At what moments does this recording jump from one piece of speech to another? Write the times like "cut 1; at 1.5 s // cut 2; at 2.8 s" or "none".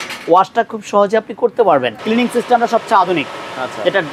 cut 1; at 2.0 s